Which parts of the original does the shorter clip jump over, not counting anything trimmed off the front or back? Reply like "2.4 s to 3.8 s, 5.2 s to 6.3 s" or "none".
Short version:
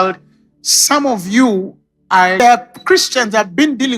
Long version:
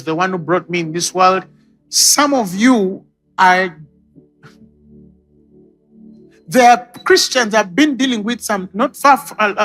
3.7 s to 6.6 s